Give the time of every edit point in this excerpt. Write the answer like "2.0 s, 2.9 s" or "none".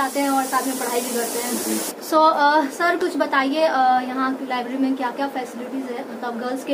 none